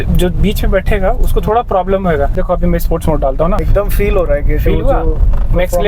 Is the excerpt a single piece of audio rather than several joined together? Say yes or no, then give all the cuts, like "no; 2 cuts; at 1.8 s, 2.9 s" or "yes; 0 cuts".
no; 2 cuts; at 2.4 s, 3.6 s